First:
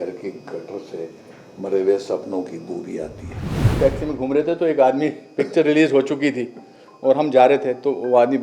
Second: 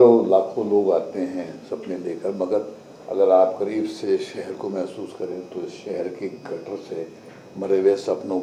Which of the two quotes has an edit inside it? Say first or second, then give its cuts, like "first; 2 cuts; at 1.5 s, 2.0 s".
first; 1 cut; at 3.6 s